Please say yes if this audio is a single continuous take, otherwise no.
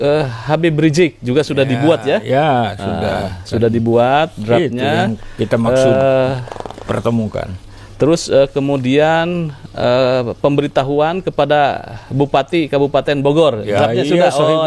yes